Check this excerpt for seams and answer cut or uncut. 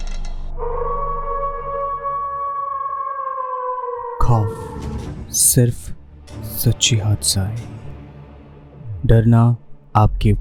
uncut